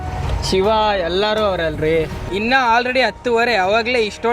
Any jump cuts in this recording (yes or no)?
yes